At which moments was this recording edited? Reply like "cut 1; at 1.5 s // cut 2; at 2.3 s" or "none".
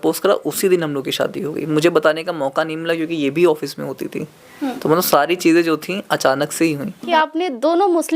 cut 1; at 7.0 s